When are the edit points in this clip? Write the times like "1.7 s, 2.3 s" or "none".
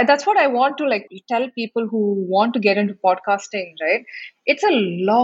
1.1 s